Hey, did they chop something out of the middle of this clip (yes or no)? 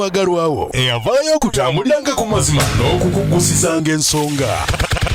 no